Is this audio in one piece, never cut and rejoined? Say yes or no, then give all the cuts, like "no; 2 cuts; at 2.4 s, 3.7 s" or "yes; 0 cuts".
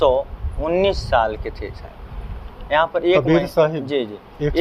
yes; 0 cuts